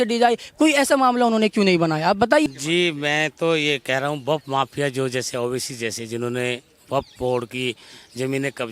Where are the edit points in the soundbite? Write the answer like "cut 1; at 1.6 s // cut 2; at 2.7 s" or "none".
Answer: cut 1; at 2.5 s